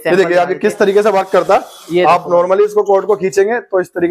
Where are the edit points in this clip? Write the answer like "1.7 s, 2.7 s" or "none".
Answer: none